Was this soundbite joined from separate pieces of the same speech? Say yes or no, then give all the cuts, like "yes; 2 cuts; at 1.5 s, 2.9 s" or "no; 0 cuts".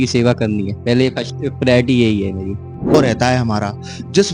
yes; 1 cut; at 2.9 s